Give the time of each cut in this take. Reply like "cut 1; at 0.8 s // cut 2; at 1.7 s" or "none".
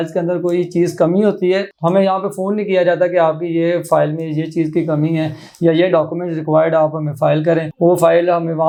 none